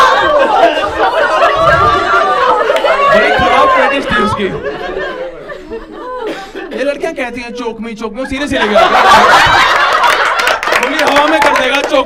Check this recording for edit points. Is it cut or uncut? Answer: uncut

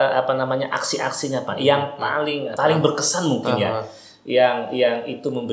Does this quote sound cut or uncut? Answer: cut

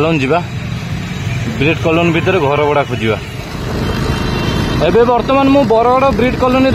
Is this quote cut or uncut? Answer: uncut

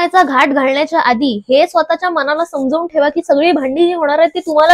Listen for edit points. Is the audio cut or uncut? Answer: uncut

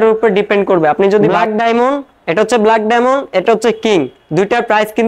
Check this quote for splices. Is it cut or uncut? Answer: cut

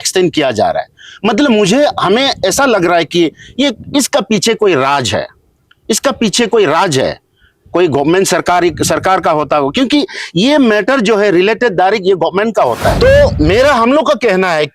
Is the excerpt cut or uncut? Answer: cut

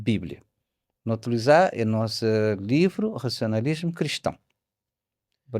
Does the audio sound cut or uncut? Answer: uncut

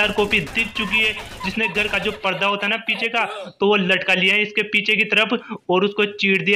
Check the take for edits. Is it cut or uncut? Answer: uncut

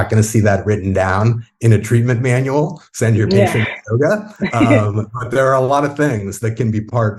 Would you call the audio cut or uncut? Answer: uncut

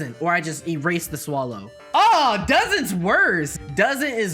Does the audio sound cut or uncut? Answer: cut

